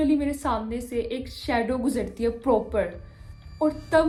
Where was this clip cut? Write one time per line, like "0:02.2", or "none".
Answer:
none